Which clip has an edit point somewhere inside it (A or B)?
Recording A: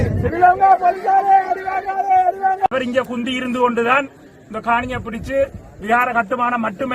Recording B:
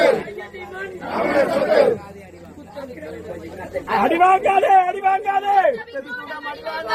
A